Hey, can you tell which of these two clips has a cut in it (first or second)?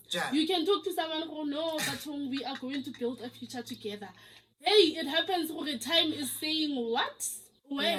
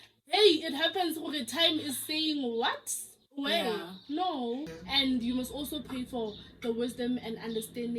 second